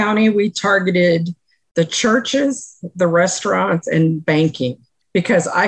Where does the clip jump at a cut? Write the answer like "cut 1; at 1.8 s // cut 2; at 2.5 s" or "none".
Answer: none